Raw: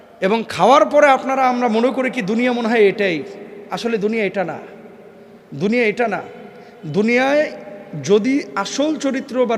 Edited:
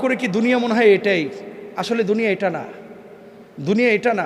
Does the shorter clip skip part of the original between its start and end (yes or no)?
no